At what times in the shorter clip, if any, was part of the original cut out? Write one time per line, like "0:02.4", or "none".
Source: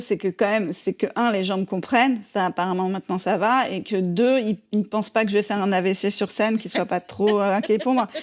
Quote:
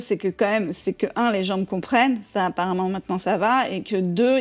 none